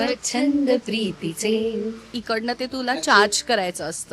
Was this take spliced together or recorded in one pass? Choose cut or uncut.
cut